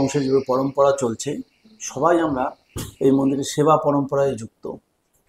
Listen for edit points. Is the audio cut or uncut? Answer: uncut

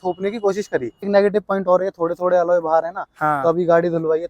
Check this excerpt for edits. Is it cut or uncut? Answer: cut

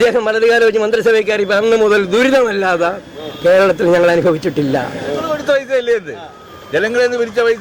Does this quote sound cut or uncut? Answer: cut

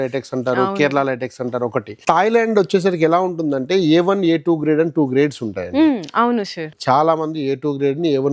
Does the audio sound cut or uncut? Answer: cut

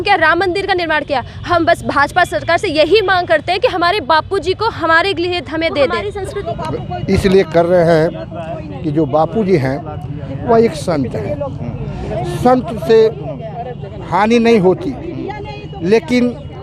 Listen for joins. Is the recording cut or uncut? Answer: cut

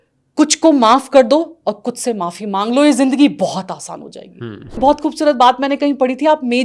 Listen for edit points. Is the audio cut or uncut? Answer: cut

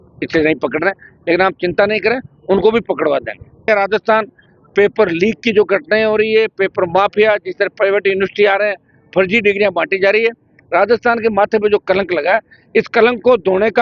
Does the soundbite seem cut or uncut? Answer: cut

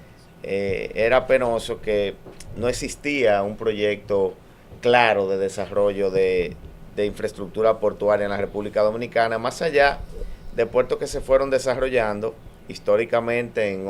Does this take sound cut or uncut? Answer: uncut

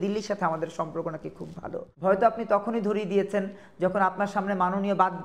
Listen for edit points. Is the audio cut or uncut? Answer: cut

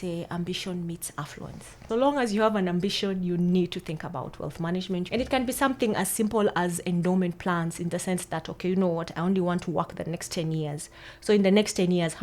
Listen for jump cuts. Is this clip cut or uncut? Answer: cut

